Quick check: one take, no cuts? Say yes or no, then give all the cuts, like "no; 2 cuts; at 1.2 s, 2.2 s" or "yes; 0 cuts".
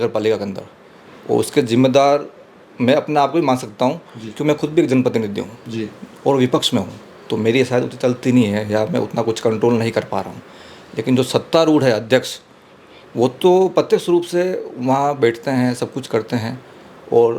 yes; 0 cuts